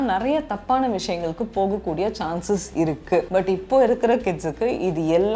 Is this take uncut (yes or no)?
no